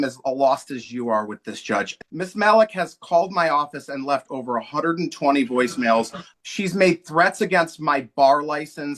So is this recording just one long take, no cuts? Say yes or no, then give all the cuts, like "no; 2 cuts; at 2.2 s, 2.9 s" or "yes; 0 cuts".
no; 2 cuts; at 2.0 s, 6.2 s